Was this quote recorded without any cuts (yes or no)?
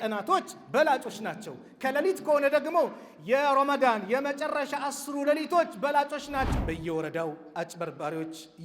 no